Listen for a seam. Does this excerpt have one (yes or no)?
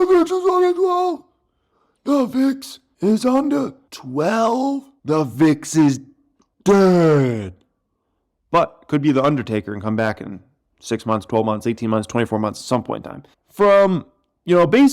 yes